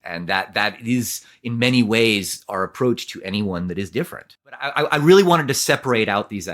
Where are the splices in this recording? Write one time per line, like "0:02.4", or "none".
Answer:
0:04.7